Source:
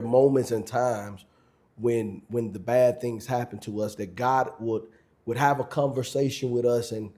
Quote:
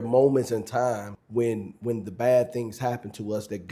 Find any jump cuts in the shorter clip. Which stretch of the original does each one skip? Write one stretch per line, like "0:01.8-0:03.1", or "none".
0:01.1-0:01.6